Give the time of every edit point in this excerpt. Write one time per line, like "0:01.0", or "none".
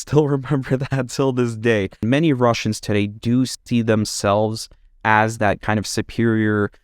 0:02.0

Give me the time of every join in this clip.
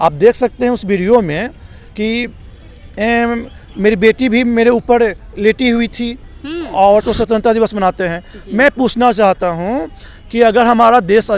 0:07.0

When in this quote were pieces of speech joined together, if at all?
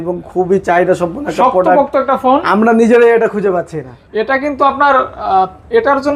none

